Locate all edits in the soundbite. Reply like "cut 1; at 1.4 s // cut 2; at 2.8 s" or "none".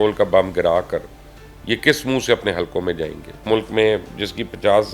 cut 1; at 3.4 s